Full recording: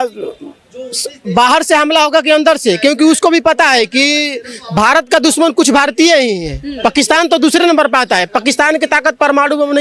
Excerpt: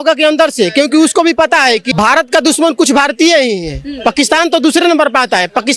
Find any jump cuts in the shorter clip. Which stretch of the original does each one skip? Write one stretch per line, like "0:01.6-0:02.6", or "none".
0:03.9-0:04.7